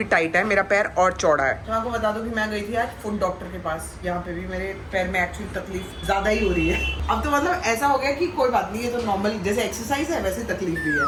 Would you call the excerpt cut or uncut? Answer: uncut